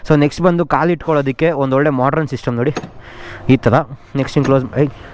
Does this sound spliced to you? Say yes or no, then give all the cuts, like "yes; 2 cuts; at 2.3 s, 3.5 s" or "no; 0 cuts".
no; 0 cuts